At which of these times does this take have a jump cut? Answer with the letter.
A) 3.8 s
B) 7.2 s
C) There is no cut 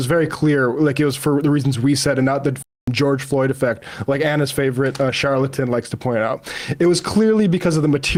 C